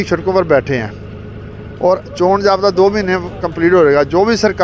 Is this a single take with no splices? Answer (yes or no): yes